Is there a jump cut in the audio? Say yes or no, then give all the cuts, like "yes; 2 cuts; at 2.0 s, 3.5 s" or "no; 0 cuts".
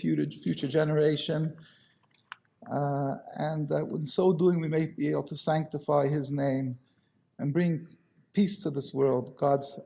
yes; 1 cut; at 2.1 s